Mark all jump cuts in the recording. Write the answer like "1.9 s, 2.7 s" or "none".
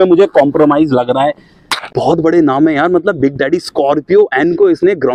2.0 s